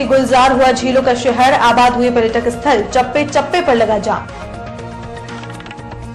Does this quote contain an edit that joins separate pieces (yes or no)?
no